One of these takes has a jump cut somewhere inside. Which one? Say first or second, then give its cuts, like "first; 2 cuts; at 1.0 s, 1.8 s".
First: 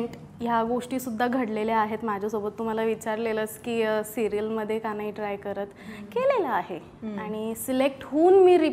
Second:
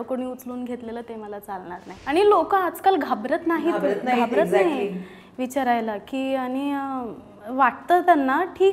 second; 1 cut; at 2.0 s